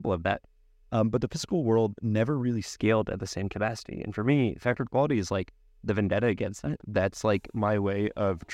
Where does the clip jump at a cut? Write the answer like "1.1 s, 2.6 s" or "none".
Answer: none